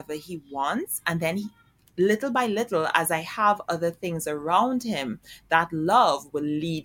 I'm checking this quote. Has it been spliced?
no; 0 cuts

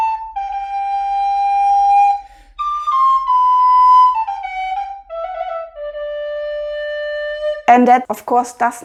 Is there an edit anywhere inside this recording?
no; 0 cuts

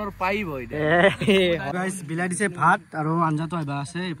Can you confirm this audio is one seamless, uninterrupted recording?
no; 1 cut; at 1.7 s

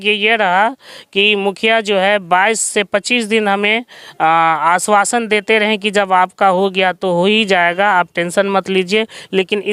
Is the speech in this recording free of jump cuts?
yes; 0 cuts

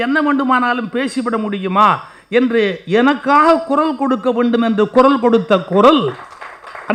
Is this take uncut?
yes; 0 cuts

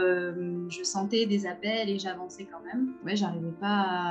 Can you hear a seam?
yes; 1 cut; at 3.0 s

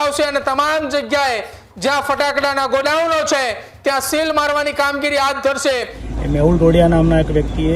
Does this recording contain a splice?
yes; 1 cut; at 6.0 s

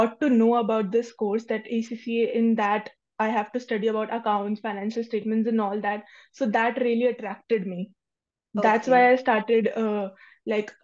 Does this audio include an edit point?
no; 0 cuts

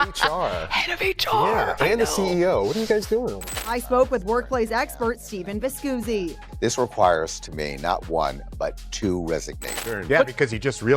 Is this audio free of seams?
no; 2 cuts; at 3.4 s, 9.6 s

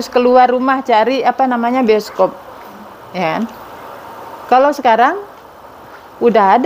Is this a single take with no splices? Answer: yes; 0 cuts

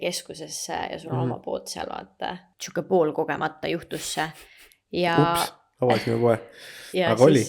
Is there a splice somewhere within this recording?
yes; 1 cut; at 2.5 s

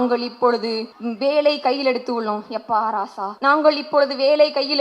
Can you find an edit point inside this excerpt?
yes; 2 cuts; at 1.2 s, 3.4 s

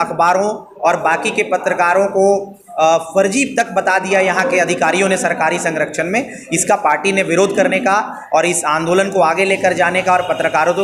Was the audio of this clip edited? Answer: no; 0 cuts

